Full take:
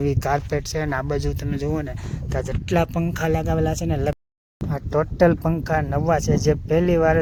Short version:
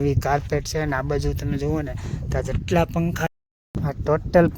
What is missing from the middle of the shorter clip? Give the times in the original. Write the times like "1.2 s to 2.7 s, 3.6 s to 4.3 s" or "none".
3.3 s to 4.1 s